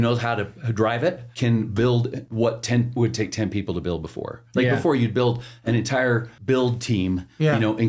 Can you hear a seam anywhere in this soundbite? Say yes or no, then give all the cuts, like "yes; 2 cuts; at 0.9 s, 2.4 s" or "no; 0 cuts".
yes; 3 cuts; at 1.3 s, 2.2 s, 6.3 s